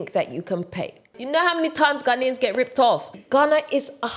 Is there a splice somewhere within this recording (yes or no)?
yes